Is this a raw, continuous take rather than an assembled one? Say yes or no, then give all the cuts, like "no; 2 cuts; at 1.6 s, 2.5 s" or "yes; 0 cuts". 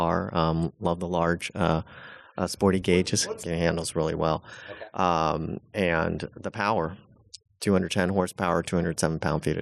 no; 1 cut; at 3.2 s